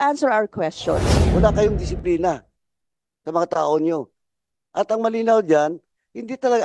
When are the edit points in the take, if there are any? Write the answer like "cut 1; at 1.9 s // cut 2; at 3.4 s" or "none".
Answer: cut 1; at 1.1 s